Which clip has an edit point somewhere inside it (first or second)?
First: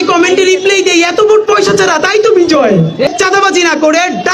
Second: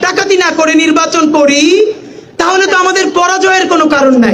first